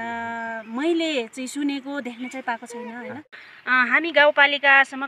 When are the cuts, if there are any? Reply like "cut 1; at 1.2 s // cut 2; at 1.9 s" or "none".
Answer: cut 1; at 3.3 s